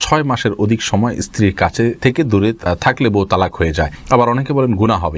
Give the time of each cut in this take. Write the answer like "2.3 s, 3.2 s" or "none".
4.0 s